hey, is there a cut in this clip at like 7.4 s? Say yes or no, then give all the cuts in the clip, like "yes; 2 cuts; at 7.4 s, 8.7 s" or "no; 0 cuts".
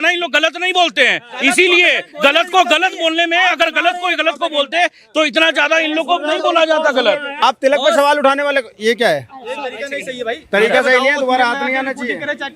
yes; 1 cut; at 7.4 s